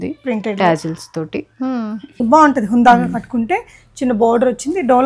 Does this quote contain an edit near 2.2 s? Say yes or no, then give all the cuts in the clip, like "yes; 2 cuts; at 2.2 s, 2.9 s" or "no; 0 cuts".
yes; 1 cut; at 2.2 s